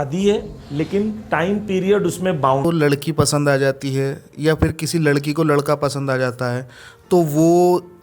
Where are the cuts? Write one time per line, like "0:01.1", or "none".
0:02.6